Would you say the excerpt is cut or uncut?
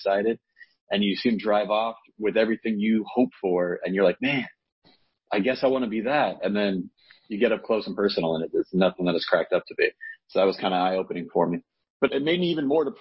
cut